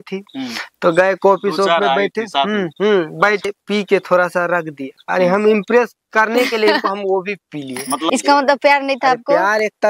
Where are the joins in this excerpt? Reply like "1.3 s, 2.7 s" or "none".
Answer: 3.4 s, 7.9 s